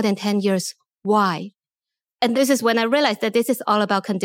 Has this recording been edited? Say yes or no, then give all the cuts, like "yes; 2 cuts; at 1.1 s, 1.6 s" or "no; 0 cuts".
no; 0 cuts